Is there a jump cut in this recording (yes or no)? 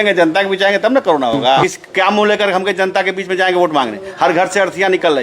yes